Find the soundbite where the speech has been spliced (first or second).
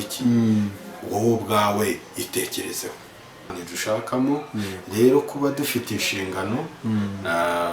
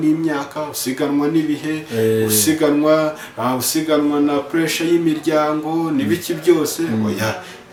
first